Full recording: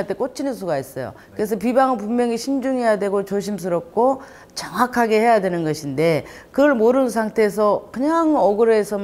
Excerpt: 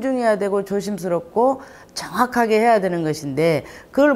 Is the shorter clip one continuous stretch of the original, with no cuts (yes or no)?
yes